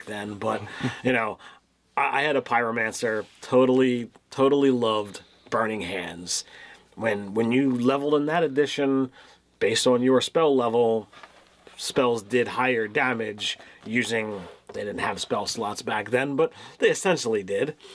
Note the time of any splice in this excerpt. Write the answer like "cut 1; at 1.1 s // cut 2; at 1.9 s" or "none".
cut 1; at 12.0 s